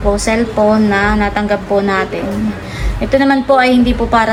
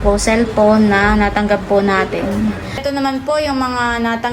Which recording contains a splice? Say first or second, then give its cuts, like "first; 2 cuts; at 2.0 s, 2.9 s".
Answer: second; 1 cut; at 2.8 s